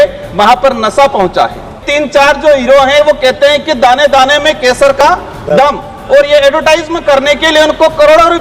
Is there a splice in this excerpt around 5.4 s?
no; 1 cut; at 1.8 s

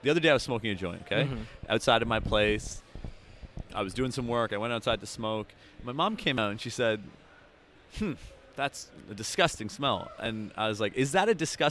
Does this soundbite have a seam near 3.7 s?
no; 0 cuts

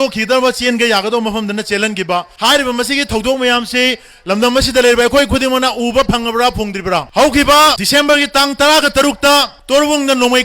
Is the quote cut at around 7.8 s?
yes; 4 cuts; at 2.3 s, 7.1 s, 7.8 s, 9.6 s

